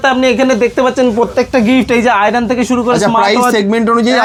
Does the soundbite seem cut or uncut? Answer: uncut